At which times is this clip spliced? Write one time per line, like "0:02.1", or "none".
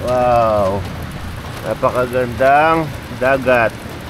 none